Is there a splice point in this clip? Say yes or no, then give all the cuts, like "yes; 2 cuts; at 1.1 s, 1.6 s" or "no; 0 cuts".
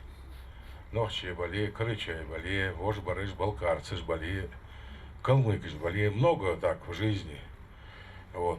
no; 0 cuts